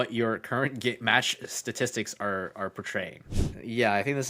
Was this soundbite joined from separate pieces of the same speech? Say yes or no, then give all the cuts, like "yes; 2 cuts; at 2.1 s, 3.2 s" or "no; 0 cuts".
yes; 1 cut; at 3.3 s